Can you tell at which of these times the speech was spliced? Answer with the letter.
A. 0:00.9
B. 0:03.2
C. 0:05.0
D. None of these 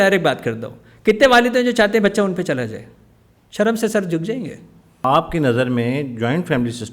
C